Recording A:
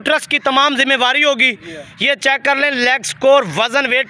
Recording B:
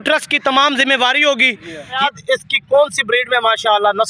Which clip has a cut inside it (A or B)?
B